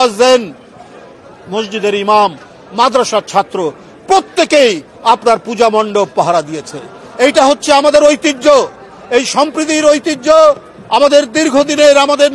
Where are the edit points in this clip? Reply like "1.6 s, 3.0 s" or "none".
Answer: none